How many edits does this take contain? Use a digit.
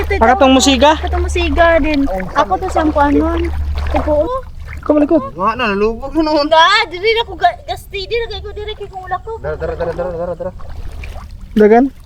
1